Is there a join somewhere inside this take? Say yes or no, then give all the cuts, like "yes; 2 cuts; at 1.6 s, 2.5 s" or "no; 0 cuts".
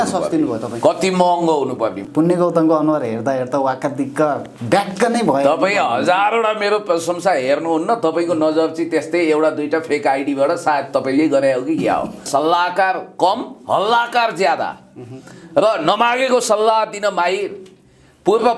yes; 2 cuts; at 2.0 s, 12.3 s